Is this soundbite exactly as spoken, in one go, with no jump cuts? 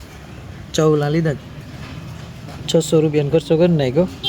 no; 1 cut; at 1.4 s

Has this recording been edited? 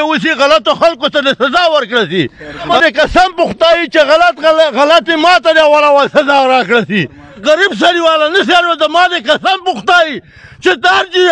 yes; 2 cuts; at 2.7 s, 7.4 s

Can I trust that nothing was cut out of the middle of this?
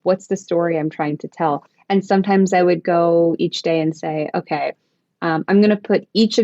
no; 1 cut; at 1.7 s

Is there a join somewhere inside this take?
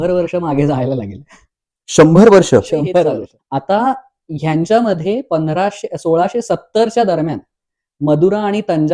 yes; 1 cut; at 3.0 s

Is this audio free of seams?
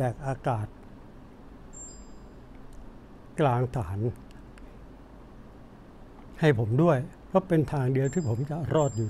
yes; 0 cuts

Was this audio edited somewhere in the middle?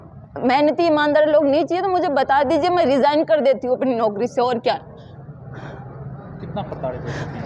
no; 0 cuts

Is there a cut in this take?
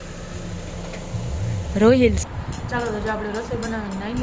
yes; 1 cut; at 2.2 s

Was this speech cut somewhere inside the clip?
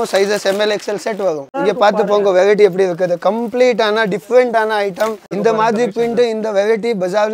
yes; 2 cuts; at 1.5 s, 5.3 s

